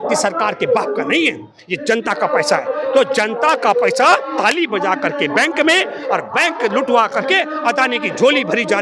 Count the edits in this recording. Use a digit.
0